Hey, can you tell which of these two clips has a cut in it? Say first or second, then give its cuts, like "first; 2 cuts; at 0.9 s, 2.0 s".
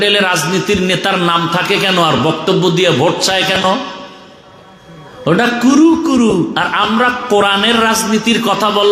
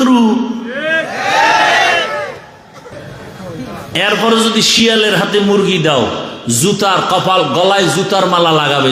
second; 1 cut; at 3.0 s